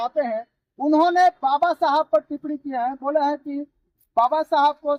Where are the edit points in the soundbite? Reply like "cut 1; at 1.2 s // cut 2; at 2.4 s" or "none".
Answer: none